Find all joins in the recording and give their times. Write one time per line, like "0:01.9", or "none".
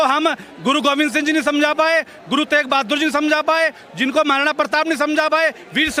none